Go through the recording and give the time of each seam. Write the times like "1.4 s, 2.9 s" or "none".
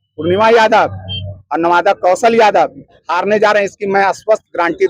none